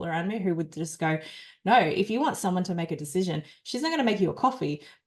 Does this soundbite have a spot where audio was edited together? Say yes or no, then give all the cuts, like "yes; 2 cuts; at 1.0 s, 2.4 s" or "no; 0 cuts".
no; 0 cuts